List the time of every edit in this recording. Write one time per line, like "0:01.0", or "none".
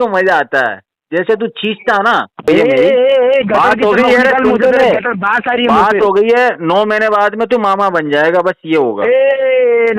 0:02.4